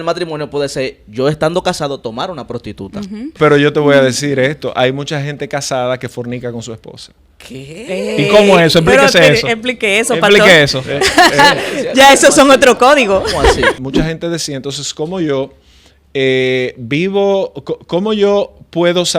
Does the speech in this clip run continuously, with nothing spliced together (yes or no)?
no